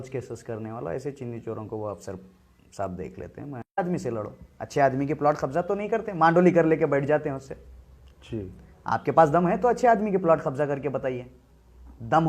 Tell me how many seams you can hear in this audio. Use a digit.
1